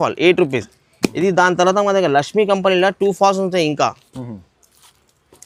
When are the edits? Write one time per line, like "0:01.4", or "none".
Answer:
none